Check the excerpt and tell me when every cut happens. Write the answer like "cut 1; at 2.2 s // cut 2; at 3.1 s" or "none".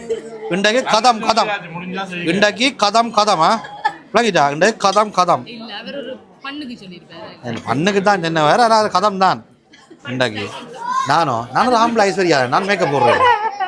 cut 1; at 11.1 s